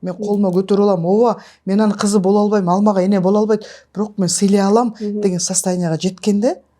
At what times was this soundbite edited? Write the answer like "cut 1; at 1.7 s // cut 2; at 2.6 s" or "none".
none